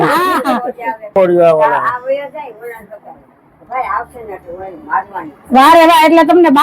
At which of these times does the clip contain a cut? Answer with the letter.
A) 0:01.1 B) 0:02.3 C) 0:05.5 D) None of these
A